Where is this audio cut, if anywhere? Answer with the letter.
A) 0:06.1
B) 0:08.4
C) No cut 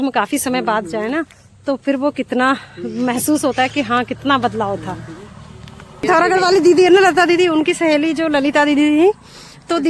A